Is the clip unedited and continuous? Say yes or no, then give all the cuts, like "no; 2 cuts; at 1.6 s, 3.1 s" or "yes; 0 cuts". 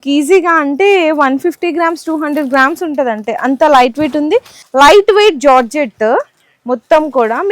no; 1 cut; at 4.6 s